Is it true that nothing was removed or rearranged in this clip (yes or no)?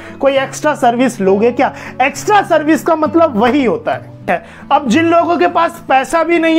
no